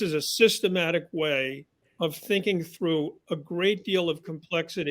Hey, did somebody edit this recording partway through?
no; 0 cuts

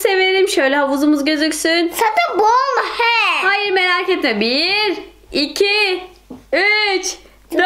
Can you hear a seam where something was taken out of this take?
no; 0 cuts

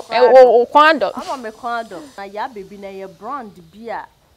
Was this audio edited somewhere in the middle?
yes; 1 cut; at 2.2 s

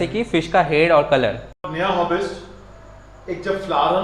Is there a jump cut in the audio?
yes; 1 cut; at 1.7 s

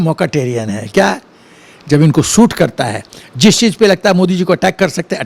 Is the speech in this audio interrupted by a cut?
no; 0 cuts

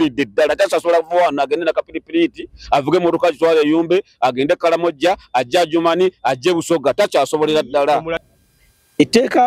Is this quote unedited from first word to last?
no; 1 cut; at 8.2 s

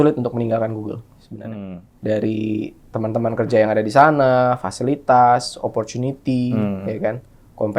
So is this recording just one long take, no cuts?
no; 2 cuts; at 1.4 s, 2.8 s

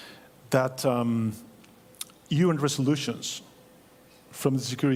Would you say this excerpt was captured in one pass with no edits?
yes; 0 cuts

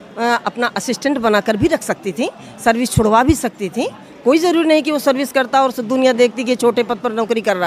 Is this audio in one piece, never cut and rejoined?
yes; 0 cuts

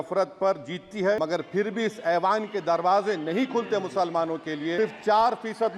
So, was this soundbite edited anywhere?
yes; 2 cuts; at 1.2 s, 4.8 s

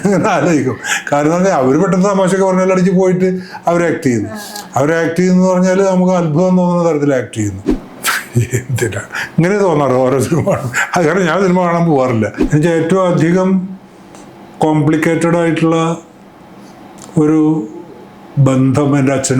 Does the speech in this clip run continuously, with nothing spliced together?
no; 2 cuts; at 7.7 s, 12.4 s

